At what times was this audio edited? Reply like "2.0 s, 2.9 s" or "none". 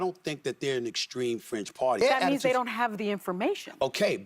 2.0 s